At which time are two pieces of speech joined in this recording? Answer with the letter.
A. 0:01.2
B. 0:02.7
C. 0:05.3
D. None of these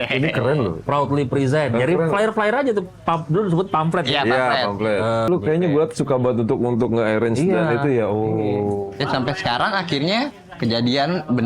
C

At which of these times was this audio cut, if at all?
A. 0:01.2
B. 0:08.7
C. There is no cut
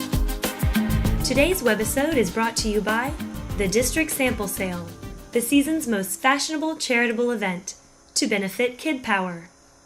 A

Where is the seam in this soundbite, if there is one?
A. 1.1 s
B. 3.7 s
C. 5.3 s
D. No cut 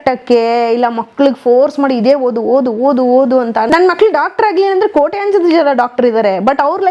B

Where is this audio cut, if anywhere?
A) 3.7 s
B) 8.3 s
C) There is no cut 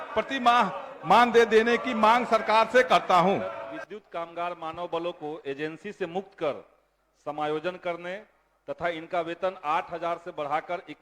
A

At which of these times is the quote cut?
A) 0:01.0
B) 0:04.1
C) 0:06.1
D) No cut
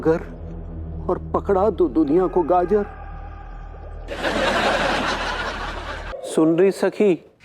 C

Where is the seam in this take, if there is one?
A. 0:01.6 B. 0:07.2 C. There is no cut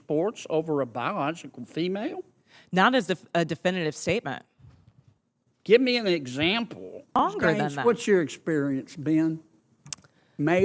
B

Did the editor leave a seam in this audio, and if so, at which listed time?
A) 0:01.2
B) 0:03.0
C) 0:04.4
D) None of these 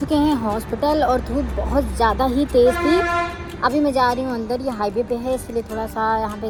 D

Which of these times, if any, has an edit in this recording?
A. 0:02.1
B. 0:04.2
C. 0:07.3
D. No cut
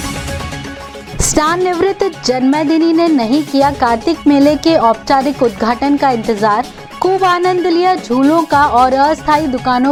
D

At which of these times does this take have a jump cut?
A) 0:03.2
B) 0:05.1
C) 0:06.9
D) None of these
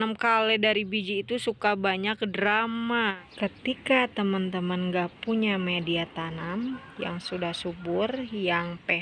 A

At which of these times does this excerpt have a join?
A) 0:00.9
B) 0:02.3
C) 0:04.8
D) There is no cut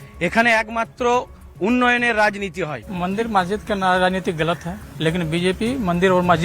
C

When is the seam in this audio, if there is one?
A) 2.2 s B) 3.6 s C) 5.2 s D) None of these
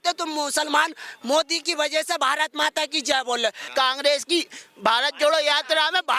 B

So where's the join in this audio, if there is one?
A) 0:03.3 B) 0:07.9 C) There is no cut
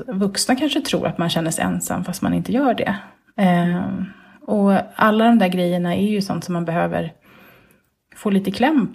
C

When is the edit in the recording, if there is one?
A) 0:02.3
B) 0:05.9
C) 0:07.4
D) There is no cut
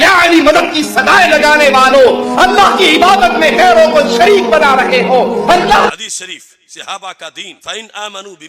B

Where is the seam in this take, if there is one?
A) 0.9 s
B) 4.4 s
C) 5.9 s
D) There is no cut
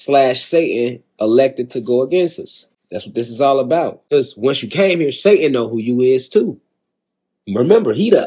D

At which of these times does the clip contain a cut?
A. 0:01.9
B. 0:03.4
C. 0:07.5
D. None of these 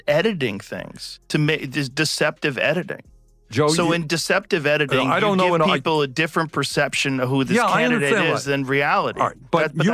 D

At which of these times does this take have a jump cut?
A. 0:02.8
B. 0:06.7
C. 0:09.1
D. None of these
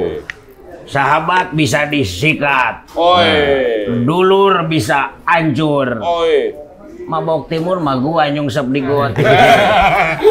C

